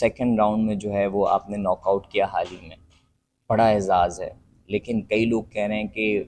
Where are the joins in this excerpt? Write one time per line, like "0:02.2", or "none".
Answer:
none